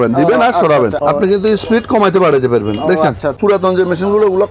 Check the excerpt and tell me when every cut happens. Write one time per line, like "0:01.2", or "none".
0:00.9
0:03.4